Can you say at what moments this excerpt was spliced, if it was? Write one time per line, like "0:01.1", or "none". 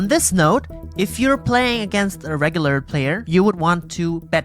0:03.2

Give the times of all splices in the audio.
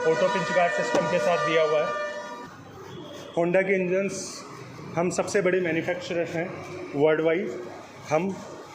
0:02.1

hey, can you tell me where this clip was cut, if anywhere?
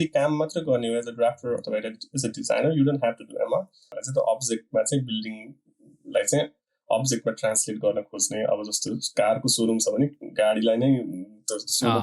0:04.0

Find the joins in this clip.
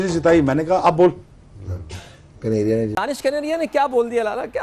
0:02.9

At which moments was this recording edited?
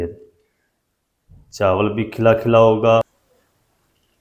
0:03.0

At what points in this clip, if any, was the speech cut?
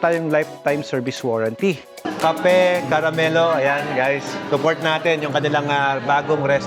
0:01.9

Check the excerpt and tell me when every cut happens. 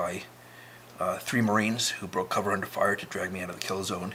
none

